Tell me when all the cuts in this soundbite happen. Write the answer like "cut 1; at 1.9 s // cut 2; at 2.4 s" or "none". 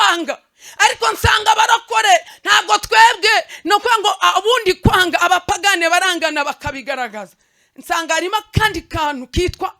cut 1; at 2.3 s